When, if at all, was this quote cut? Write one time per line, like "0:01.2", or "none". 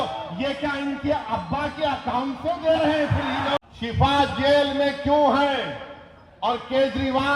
0:03.6